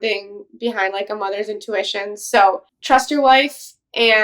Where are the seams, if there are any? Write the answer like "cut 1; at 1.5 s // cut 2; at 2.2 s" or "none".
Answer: cut 1; at 2.7 s